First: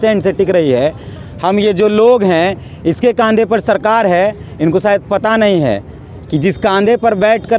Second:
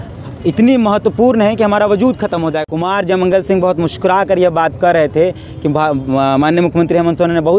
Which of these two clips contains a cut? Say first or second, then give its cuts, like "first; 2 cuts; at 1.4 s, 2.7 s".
second; 1 cut; at 2.6 s